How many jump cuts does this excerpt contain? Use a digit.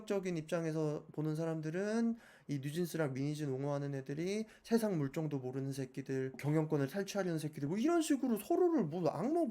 1